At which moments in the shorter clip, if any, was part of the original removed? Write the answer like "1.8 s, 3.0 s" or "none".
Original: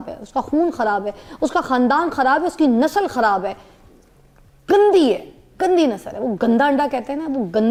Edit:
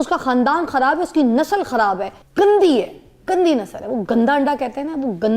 2.2 s